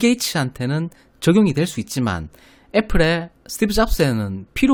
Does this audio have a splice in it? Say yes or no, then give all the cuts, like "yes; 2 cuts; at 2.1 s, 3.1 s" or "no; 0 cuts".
no; 0 cuts